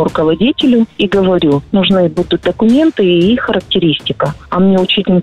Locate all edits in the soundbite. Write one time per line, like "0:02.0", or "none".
0:01.6